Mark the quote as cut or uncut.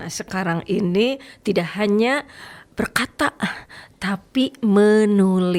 uncut